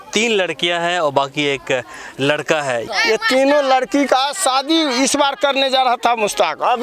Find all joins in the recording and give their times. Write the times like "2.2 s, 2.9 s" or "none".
2.9 s